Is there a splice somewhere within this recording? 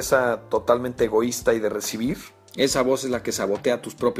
yes; 1 cut; at 2.4 s

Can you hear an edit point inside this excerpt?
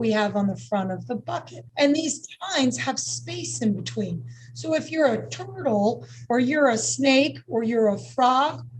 yes; 1 cut; at 1.8 s

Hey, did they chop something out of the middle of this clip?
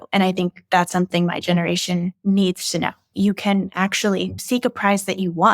yes; 2 cuts; at 3.1 s, 4.4 s

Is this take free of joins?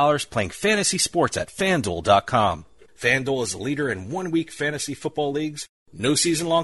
yes; 0 cuts

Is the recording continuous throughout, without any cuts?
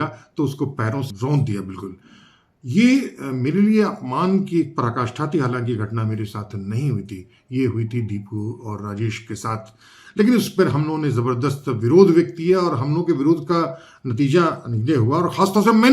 no; 1 cut; at 1.1 s

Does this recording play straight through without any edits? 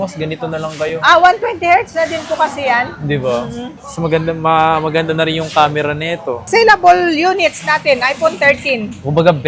yes; 0 cuts

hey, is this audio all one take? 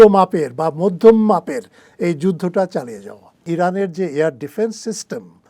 no; 1 cut; at 3.4 s

